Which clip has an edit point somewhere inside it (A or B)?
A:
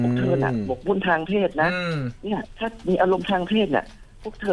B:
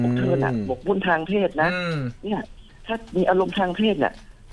A